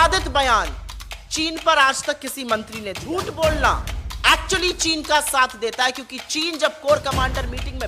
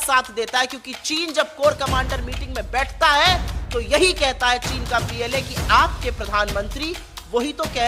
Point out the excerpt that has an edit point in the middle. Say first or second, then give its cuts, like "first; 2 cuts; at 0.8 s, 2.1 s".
first; 1 cut; at 3.0 s